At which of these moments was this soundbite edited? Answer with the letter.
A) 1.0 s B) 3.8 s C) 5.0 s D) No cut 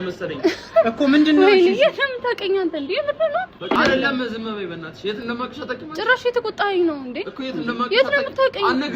B